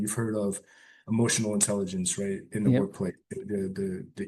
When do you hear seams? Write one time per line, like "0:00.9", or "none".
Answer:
none